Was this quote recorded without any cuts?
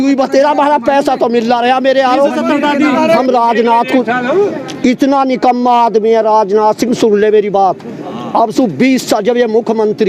no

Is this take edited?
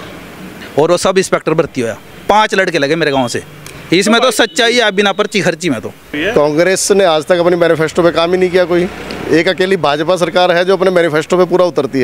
yes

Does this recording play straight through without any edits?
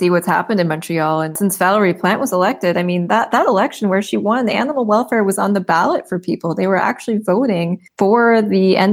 no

